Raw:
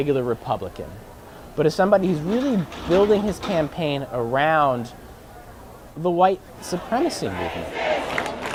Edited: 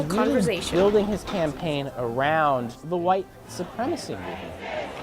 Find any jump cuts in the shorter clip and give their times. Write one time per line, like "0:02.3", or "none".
0:02.8